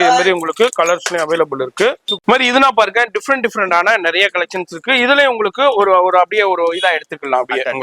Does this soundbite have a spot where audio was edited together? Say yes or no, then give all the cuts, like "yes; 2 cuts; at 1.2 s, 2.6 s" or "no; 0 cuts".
no; 0 cuts